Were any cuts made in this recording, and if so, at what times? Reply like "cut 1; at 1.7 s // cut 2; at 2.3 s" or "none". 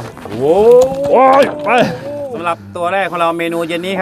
cut 1; at 2.3 s